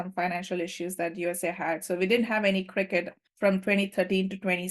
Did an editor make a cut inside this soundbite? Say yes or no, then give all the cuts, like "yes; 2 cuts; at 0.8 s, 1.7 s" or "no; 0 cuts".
yes; 1 cut; at 3.2 s